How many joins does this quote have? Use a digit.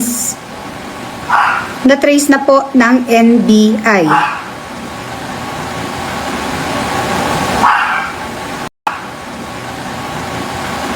1